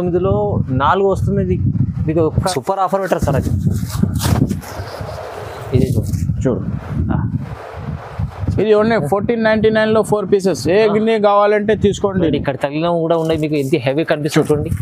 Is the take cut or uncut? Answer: cut